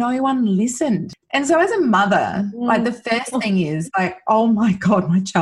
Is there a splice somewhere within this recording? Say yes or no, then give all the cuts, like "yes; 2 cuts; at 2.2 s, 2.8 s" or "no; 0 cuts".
yes; 1 cut; at 1.2 s